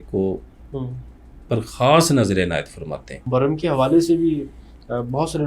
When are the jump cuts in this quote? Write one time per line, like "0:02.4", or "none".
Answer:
0:03.2